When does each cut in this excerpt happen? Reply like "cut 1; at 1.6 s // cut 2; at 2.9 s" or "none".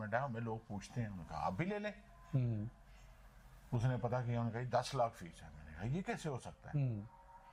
none